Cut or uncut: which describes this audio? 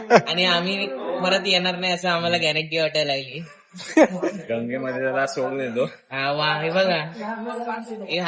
uncut